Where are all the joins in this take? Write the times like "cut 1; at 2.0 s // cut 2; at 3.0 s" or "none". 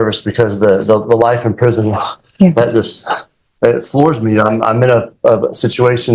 none